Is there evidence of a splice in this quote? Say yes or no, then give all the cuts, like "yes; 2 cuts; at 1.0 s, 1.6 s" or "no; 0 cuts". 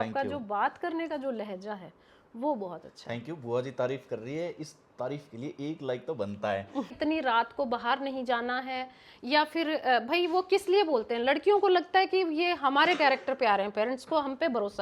yes; 1 cut; at 6.9 s